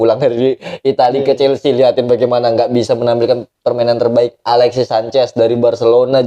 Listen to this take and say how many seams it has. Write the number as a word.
zero